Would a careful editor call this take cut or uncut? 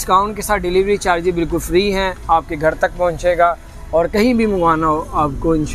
uncut